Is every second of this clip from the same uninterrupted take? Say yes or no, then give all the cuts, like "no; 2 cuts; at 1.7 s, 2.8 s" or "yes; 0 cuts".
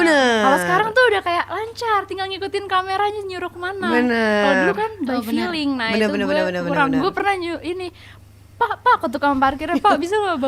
yes; 0 cuts